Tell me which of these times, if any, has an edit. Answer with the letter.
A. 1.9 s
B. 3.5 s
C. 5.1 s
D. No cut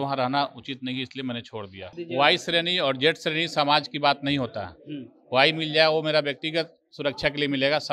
A